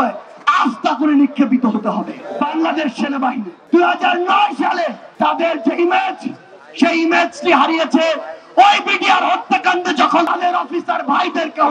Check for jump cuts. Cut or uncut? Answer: cut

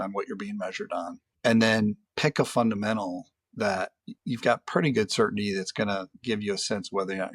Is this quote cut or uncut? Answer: cut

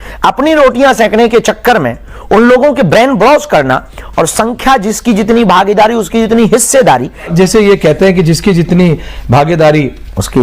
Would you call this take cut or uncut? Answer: cut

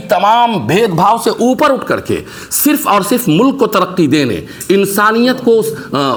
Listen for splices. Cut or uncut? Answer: uncut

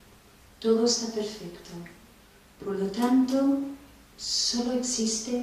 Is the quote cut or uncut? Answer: uncut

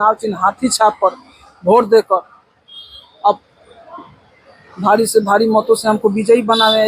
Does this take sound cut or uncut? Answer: uncut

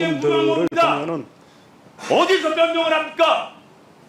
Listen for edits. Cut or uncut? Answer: uncut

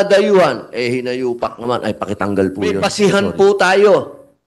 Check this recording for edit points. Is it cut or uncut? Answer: cut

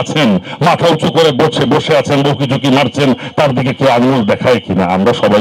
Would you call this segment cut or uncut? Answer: uncut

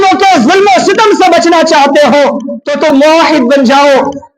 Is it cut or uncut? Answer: cut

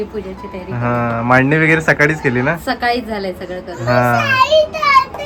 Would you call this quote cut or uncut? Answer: uncut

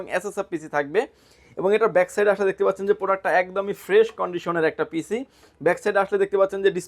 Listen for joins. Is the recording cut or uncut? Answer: uncut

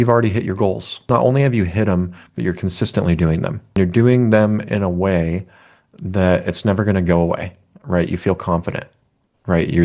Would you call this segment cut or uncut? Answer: cut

